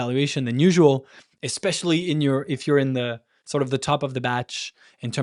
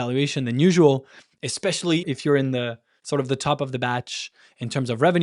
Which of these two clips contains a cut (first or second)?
second